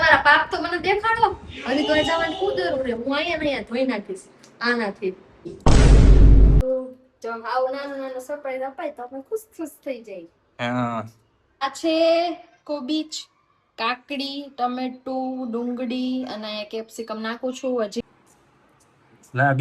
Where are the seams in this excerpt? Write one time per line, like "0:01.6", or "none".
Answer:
0:06.6
0:11.6
0:18.1